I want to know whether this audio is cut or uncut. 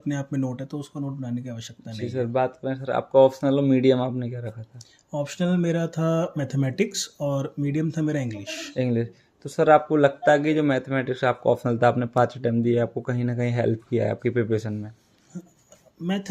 uncut